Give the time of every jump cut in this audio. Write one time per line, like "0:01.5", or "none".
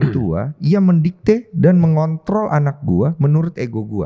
none